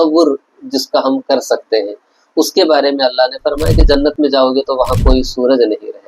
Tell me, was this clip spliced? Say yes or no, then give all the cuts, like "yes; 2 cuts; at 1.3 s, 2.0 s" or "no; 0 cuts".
no; 0 cuts